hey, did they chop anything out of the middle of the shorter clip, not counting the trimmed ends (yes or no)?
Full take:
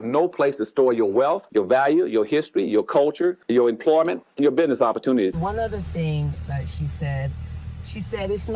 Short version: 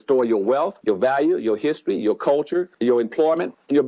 no